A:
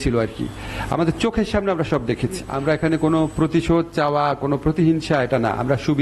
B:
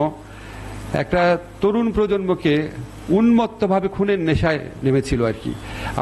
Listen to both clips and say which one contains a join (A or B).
A